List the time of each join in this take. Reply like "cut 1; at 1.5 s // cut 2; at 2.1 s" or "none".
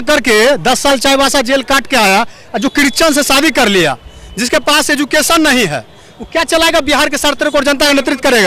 none